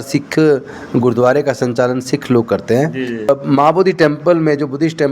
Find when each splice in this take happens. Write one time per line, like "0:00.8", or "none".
0:03.3